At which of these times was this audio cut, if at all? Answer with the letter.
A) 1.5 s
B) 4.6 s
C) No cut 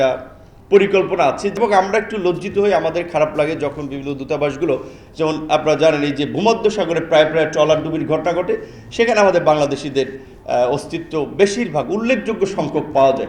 A